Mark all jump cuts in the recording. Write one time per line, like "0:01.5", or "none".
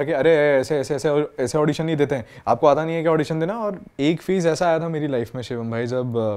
0:03.8